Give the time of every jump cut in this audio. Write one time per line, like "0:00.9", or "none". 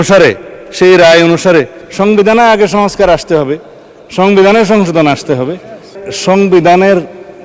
0:05.9

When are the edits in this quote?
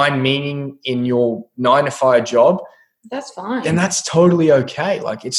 none

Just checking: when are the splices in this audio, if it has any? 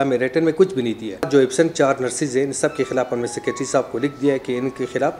0:01.3

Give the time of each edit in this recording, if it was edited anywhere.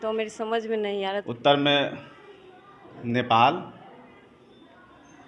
0:01.1

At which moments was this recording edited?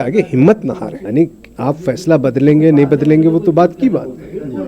0:01.0

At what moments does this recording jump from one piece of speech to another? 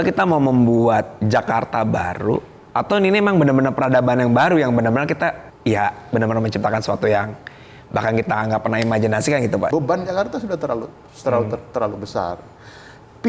0:02.5
0:05.5
0:09.7

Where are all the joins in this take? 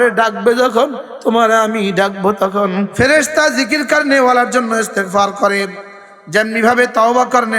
0:02.9

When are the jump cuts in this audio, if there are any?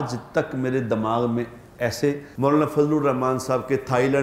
0:02.3

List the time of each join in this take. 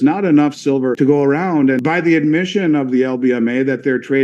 0:00.9
0:01.8

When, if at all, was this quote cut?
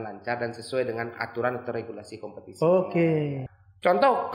0:03.4

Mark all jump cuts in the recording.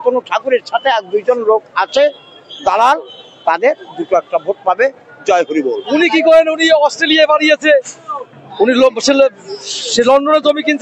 0:05.8

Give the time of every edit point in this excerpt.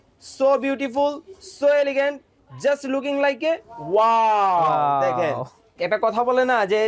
0:05.6

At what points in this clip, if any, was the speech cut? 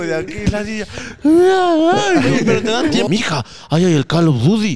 0:03.1

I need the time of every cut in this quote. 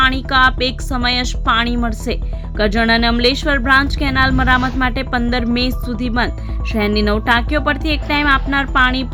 none

